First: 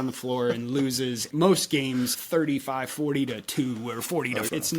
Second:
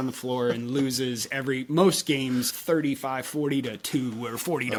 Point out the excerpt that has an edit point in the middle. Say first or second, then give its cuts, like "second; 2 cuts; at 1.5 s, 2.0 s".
first; 1 cut; at 1.3 s